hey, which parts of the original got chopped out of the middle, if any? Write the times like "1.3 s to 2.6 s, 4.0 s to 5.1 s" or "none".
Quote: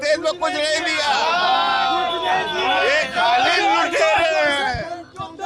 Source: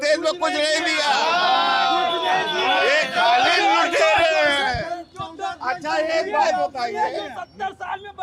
none